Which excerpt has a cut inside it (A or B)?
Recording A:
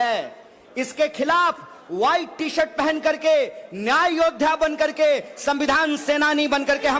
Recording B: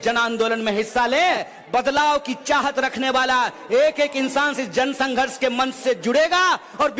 B